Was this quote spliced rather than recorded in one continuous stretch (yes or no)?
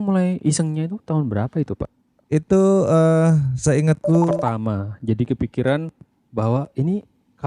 yes